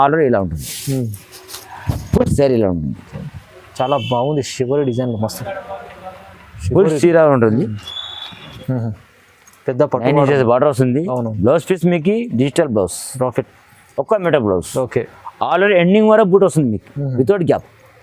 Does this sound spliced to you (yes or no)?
yes